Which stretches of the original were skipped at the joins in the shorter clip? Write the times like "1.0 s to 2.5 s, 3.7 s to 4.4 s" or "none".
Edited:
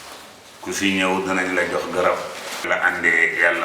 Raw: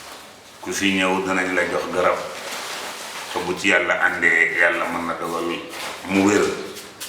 2.7 s to 3.9 s